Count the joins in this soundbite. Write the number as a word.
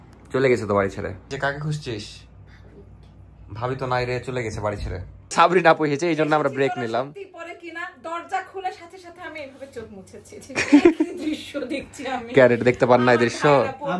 two